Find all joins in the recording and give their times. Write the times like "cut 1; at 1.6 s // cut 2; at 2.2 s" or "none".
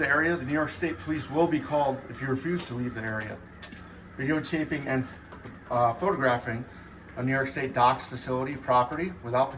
none